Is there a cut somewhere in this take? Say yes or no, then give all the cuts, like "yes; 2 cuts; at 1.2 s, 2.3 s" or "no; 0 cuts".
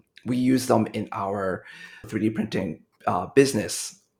yes; 1 cut; at 2.1 s